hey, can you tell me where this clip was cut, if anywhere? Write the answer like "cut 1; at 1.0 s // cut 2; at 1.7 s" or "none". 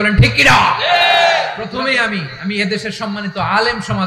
cut 1; at 1.6 s